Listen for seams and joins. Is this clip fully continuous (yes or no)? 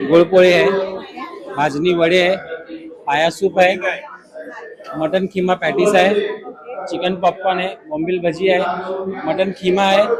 yes